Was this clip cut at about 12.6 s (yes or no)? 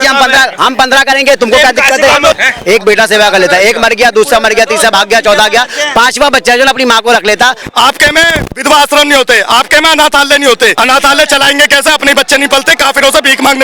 no